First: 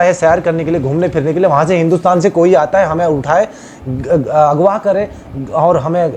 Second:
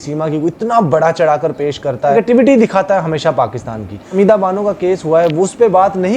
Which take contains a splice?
second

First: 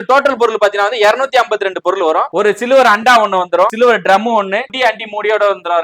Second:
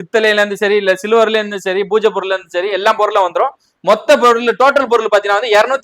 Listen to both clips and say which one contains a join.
first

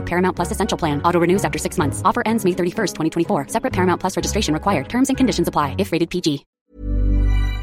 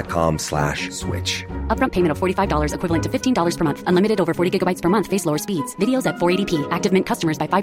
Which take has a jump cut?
first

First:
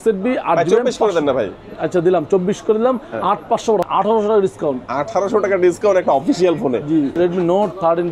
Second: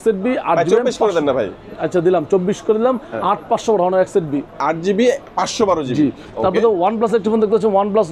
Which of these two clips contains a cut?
first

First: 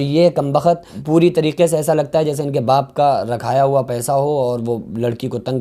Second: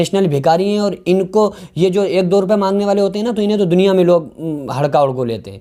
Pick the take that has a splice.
first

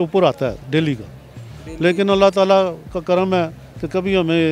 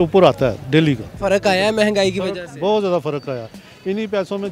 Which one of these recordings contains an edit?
second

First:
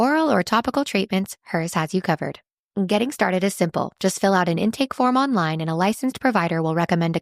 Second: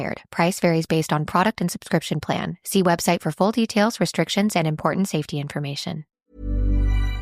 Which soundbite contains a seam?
second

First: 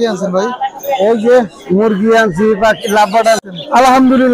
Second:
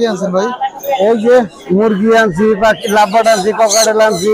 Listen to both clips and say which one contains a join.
first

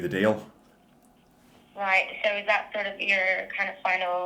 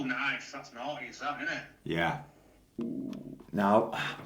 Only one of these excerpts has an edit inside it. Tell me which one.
second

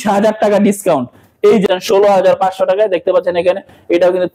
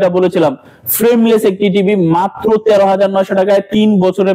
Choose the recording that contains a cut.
first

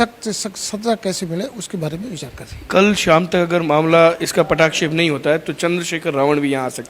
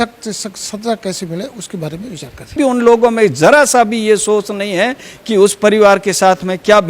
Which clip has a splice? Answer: second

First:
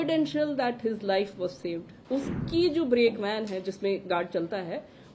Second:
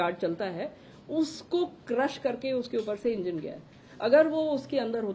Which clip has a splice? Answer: first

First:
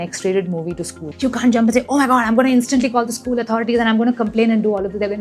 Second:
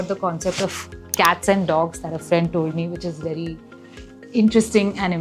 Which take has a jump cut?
first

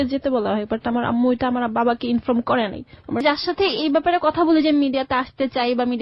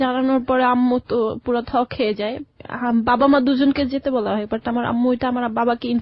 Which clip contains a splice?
first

